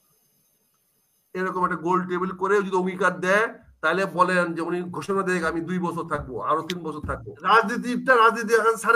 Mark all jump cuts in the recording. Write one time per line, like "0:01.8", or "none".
0:07.3